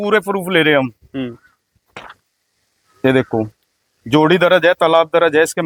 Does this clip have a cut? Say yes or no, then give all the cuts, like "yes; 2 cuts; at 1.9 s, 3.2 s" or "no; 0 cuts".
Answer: no; 0 cuts